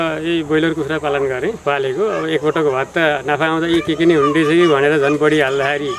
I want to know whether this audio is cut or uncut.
cut